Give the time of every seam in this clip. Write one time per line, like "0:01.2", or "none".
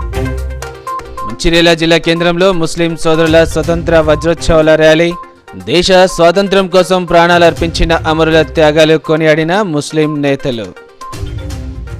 0:01.0